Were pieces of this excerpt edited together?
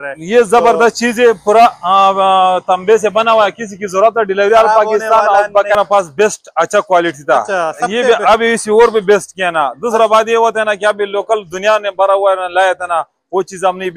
yes; 1 cut; at 5.7 s

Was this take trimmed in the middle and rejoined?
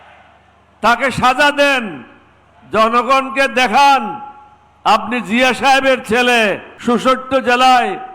yes; 1 cut; at 6.7 s

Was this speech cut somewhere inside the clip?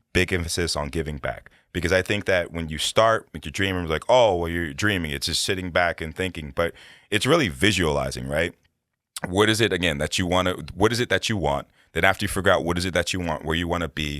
no; 0 cuts

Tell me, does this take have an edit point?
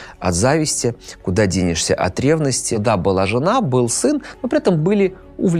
yes; 1 cut; at 2.7 s

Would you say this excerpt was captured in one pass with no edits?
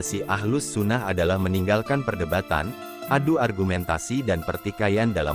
yes; 0 cuts

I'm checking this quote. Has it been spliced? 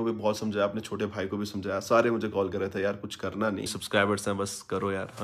yes; 1 cut; at 3.6 s

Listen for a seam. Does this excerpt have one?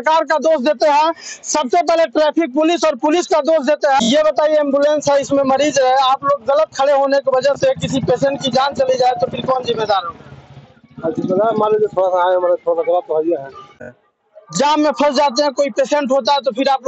yes; 2 cuts; at 4.0 s, 13.9 s

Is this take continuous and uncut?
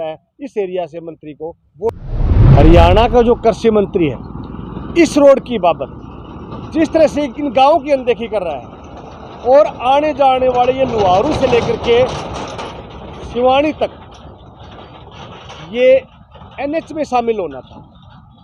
no; 1 cut; at 2.4 s

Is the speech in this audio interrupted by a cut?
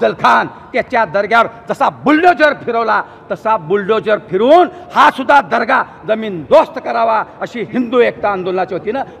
no; 0 cuts

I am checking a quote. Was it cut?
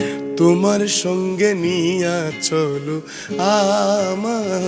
no; 0 cuts

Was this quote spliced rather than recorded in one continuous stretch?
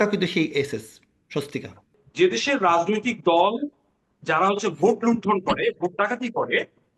yes; 1 cut; at 2.0 s

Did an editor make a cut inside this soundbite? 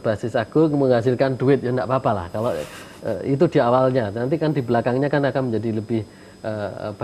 no; 0 cuts

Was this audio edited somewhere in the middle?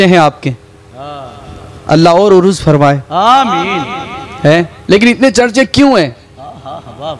no; 0 cuts

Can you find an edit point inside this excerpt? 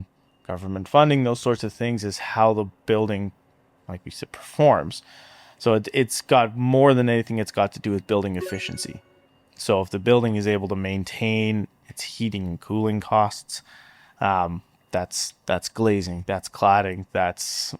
no; 0 cuts

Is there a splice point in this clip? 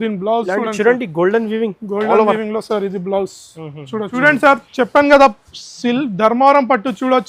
yes; 1 cut; at 4.1 s

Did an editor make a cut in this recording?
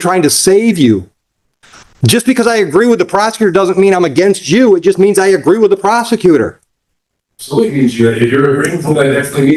no; 0 cuts

